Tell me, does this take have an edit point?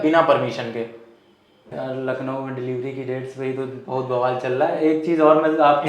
yes; 1 cut; at 1.7 s

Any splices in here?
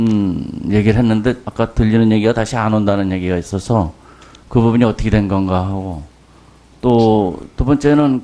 no; 0 cuts

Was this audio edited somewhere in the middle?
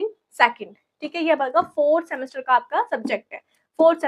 no; 0 cuts

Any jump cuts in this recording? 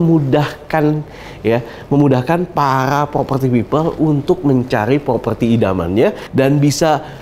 yes; 1 cut; at 6.2 s

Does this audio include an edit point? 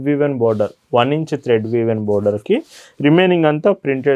no; 0 cuts

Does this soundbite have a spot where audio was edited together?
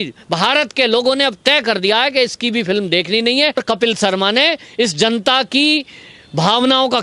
yes; 1 cut; at 3.6 s

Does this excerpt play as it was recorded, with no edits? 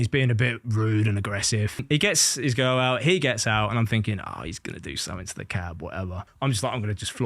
no; 2 cuts; at 1.8 s, 6.3 s

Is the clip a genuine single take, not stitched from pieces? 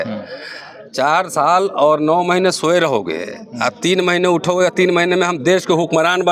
yes; 0 cuts

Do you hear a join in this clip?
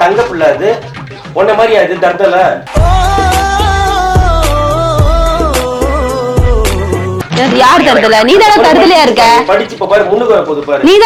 no; 0 cuts

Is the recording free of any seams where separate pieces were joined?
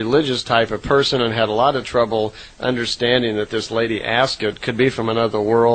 no; 1 cut; at 2.6 s

